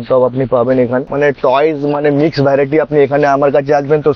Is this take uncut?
yes; 0 cuts

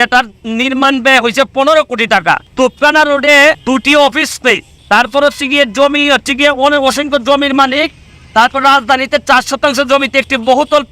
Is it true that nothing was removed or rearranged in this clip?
no; 3 cuts; at 2.5 s, 3.6 s, 4.7 s

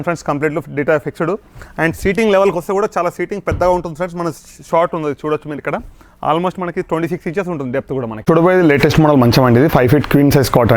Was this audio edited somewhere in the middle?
yes; 1 cut; at 8.2 s

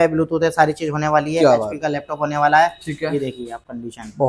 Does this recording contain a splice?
no; 0 cuts

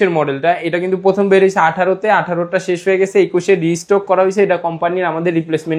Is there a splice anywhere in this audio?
no; 0 cuts

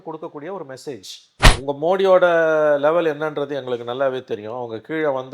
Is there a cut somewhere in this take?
yes; 1 cut; at 1.4 s

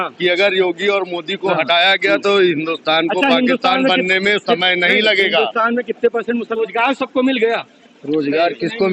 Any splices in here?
yes; 1 cut; at 6.6 s

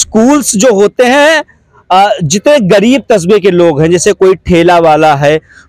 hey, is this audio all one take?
yes; 0 cuts

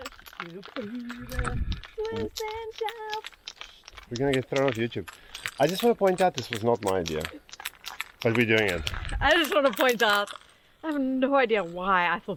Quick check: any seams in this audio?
no; 0 cuts

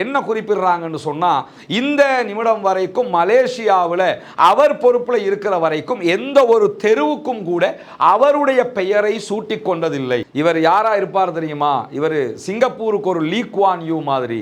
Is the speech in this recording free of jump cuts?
no; 1 cut; at 10.3 s

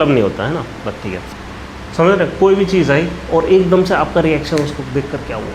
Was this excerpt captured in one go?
no; 1 cut; at 1.3 s

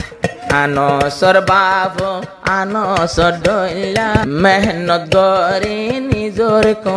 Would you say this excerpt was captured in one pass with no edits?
no; 1 cut; at 4.2 s

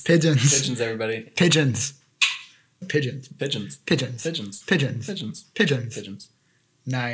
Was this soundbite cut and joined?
yes; 1 cut; at 2.8 s

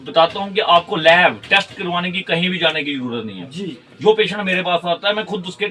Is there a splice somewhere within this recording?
no; 0 cuts

